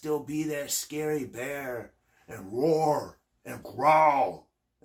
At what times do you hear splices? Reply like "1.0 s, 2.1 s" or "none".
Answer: none

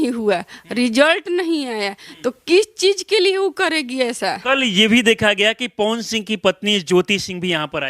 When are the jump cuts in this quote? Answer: 4.4 s

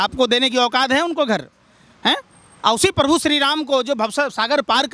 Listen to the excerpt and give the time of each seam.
none

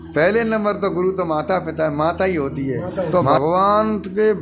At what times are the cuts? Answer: 3.1 s

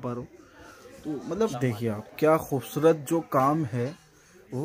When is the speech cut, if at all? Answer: 1.5 s

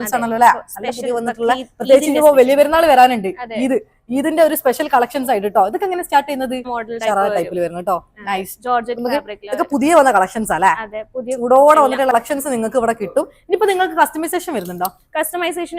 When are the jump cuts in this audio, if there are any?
6.7 s, 12.1 s

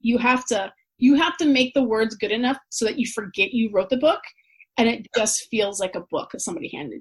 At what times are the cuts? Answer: none

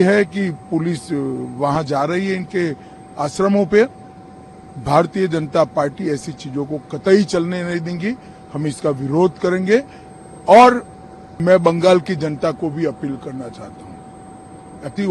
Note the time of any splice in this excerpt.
none

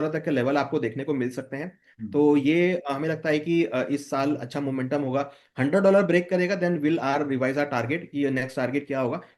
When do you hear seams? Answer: none

